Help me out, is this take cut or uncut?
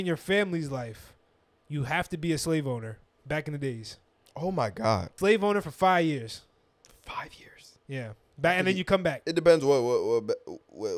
cut